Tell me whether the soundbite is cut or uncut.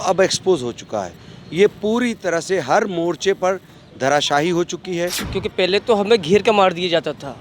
cut